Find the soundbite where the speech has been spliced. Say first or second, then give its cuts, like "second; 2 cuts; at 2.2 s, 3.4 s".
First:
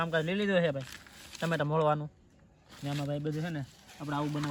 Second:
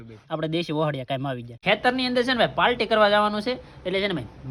second; 1 cut; at 1.6 s